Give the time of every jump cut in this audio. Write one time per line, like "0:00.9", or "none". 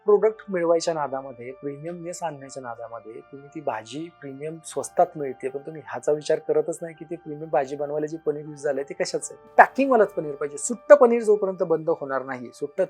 0:09.5